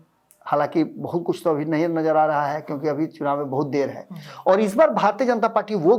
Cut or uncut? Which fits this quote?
uncut